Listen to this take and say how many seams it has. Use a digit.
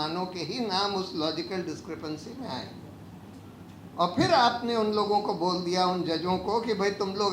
0